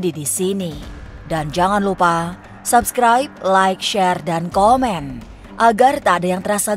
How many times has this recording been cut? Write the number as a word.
zero